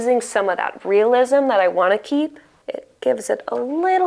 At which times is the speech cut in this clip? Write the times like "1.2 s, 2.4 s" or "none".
2.5 s